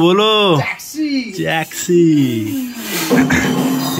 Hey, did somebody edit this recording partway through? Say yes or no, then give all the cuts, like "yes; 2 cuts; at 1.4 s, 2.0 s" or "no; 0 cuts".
no; 0 cuts